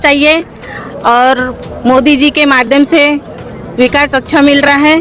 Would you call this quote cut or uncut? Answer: uncut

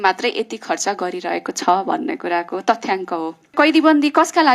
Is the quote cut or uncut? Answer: cut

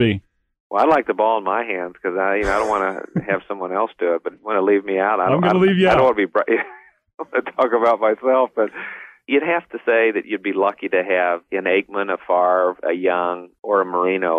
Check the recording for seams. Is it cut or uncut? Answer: cut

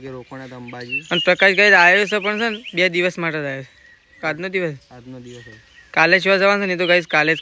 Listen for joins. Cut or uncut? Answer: uncut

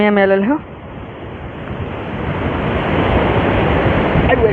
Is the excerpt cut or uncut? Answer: uncut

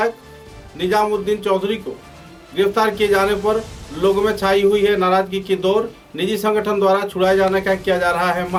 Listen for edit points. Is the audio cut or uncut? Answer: uncut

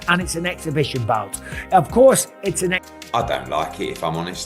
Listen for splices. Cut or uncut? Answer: cut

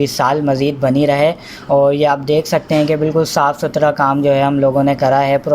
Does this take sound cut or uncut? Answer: uncut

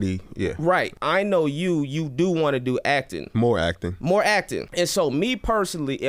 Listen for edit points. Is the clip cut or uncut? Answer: cut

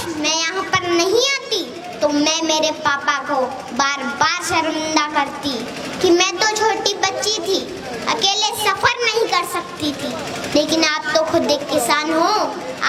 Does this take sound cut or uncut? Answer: uncut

